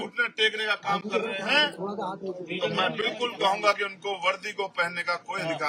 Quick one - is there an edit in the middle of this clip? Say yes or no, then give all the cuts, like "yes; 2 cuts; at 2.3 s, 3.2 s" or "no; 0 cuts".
no; 0 cuts